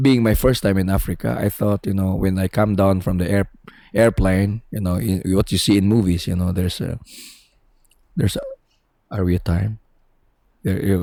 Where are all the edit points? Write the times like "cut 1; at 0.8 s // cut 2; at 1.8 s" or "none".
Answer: none